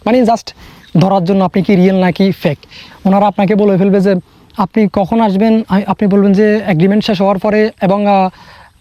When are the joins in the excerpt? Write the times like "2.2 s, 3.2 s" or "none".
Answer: none